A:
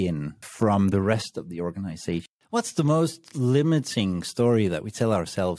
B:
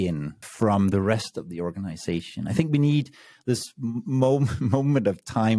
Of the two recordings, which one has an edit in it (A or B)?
A